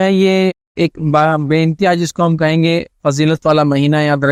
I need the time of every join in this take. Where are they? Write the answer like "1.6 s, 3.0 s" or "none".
none